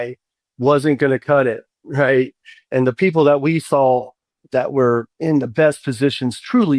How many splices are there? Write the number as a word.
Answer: one